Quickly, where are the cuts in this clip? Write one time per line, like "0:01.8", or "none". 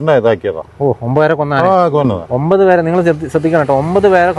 none